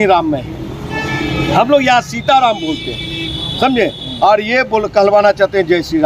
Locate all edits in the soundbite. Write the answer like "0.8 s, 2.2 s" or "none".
none

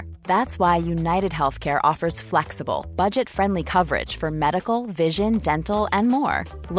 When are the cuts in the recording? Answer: none

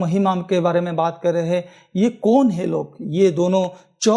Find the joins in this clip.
none

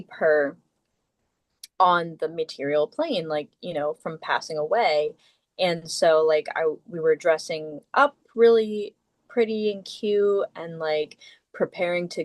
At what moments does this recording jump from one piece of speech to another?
none

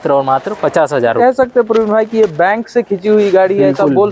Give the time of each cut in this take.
1.2 s

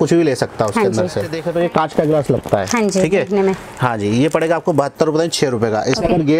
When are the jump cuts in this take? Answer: 1.4 s

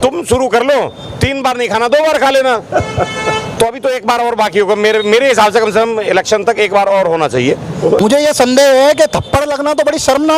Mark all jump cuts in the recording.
8.0 s

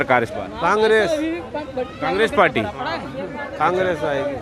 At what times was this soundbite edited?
none

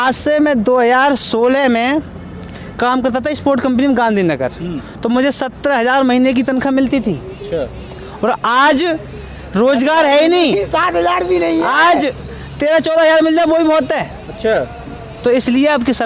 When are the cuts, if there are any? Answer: none

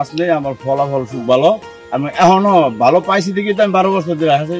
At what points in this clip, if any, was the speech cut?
1.8 s

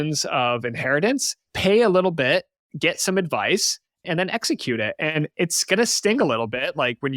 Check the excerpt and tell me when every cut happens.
1.4 s

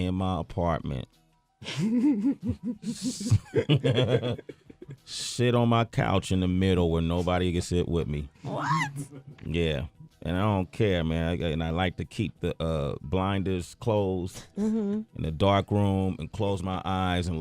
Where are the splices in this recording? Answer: 8.4 s

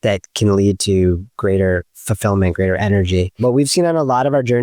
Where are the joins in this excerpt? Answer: 3.4 s

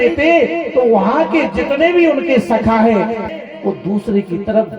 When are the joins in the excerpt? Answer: 3.2 s

